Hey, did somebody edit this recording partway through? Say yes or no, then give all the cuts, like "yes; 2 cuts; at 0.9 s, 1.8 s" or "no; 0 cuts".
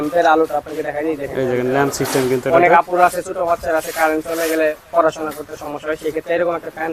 no; 0 cuts